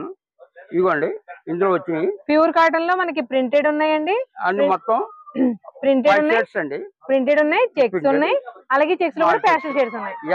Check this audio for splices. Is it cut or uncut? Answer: uncut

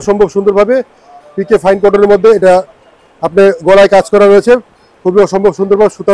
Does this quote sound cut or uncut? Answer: uncut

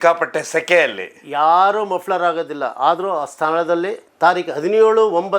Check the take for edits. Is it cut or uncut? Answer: cut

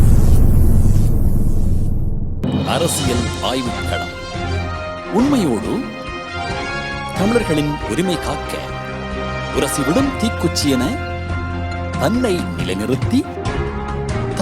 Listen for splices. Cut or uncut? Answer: cut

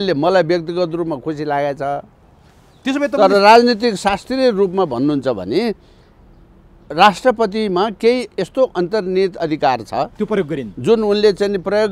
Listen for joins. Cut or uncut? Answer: uncut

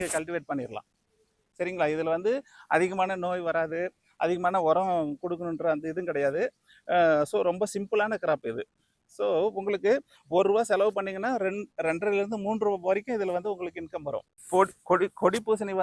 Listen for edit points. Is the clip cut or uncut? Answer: cut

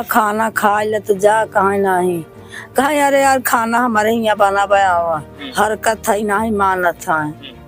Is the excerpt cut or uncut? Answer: uncut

